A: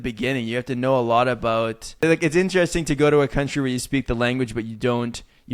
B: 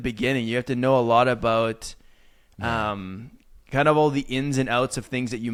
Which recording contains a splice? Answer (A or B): A